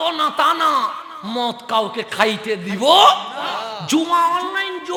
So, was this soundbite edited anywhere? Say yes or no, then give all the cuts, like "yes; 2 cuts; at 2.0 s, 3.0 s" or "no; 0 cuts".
no; 0 cuts